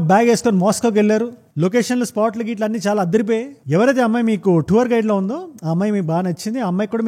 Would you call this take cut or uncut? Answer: cut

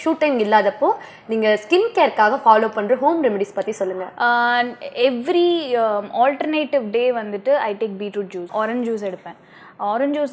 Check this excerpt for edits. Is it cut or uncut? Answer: uncut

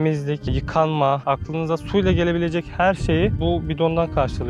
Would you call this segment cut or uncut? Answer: cut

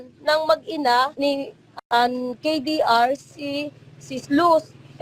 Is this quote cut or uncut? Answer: cut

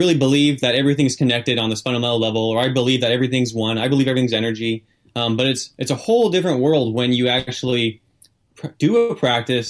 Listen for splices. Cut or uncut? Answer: uncut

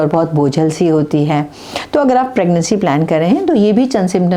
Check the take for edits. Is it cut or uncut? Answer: uncut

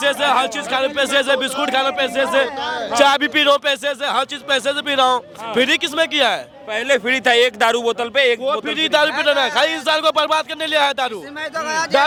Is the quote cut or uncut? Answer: uncut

